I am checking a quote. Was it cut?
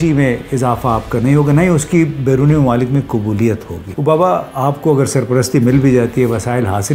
yes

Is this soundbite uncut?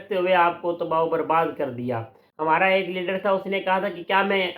no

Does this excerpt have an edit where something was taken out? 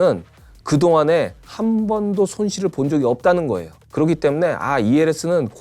yes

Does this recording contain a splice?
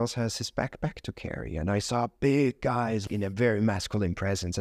yes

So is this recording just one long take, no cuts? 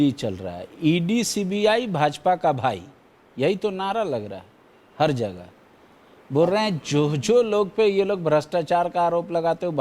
yes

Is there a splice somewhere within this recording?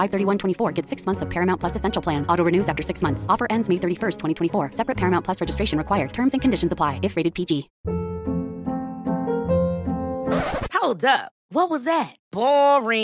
yes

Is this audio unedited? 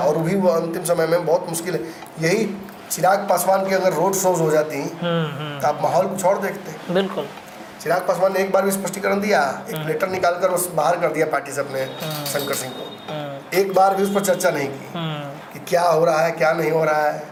yes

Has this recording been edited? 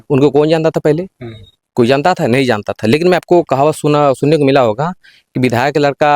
yes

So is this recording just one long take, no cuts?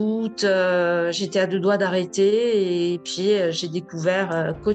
yes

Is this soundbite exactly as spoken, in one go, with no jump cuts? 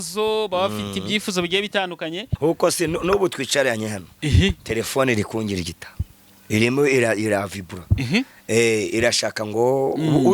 no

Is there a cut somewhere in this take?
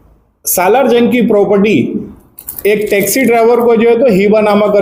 no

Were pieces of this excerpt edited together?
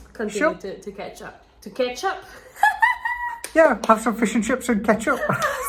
no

